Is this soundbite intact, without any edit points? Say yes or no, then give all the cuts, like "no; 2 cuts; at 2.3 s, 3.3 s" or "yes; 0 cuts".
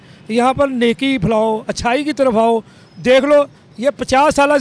yes; 0 cuts